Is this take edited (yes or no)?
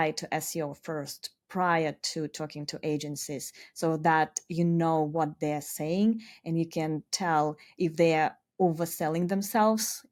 no